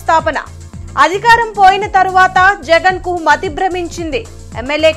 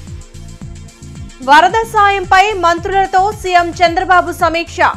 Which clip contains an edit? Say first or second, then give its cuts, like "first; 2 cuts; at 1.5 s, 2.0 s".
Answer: second; 1 cut; at 0.9 s